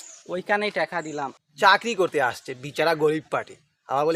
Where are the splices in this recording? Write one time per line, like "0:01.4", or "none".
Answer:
0:01.4